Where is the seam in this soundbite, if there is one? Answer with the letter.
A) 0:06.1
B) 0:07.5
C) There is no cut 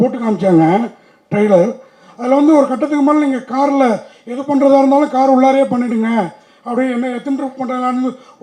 C